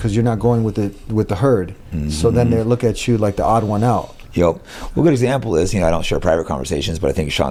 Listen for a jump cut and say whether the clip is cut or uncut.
uncut